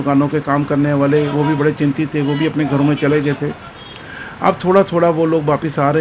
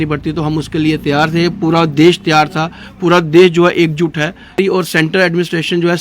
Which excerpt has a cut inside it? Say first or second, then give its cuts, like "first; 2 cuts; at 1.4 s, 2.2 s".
second; 1 cut; at 4.6 s